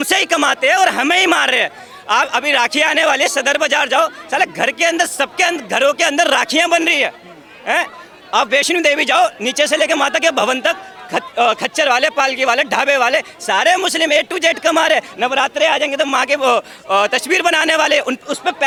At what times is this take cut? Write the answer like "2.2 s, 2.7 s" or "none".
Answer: none